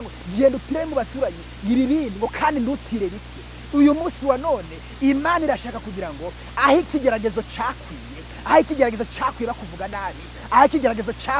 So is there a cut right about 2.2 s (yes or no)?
no